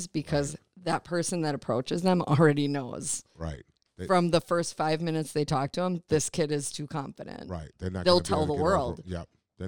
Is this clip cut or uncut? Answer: uncut